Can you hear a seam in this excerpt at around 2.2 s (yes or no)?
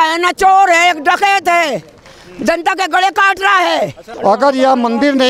no